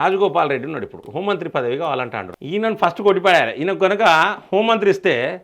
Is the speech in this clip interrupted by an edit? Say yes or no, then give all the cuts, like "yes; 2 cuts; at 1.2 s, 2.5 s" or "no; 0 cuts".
yes; 2 cuts; at 1.0 s, 2.3 s